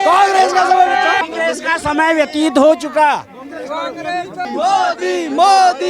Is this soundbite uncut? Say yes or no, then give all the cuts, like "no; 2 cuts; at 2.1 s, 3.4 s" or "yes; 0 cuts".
yes; 0 cuts